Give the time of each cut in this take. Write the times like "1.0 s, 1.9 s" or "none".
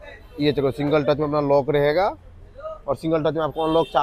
none